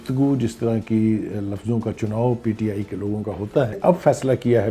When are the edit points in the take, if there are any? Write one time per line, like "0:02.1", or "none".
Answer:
0:03.8